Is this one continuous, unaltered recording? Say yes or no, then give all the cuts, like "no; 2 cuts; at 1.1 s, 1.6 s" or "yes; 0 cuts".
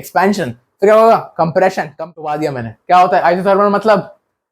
no; 1 cut; at 1.9 s